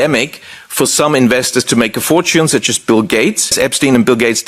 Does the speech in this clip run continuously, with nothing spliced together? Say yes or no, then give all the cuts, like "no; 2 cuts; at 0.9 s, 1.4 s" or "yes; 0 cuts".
no; 1 cut; at 3.5 s